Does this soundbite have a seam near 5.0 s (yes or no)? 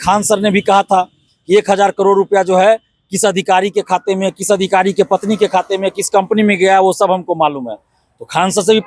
no